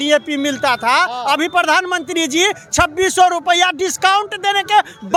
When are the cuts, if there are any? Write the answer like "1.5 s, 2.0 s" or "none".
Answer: none